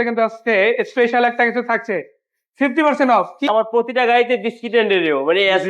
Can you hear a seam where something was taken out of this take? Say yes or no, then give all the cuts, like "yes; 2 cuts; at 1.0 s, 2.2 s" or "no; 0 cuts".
yes; 1 cut; at 3.5 s